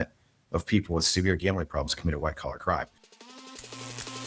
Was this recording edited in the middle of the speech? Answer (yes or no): yes